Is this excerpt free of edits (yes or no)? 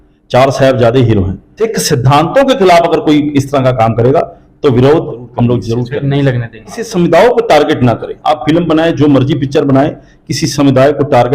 no